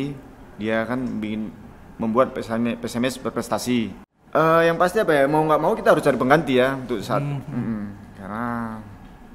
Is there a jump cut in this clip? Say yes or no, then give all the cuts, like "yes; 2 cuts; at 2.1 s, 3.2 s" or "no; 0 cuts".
yes; 1 cut; at 4.0 s